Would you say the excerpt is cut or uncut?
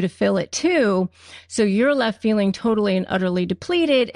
uncut